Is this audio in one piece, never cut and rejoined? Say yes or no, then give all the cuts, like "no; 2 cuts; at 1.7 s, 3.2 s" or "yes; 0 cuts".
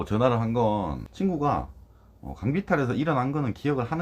no; 1 cut; at 1.0 s